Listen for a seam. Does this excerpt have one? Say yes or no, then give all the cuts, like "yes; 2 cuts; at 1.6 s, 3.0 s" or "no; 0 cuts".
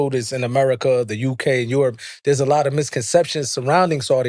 no; 0 cuts